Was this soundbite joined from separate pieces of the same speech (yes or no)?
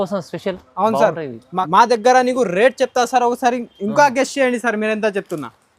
yes